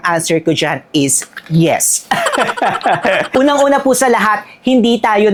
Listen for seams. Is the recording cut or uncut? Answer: uncut